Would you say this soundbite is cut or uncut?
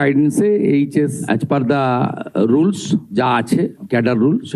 uncut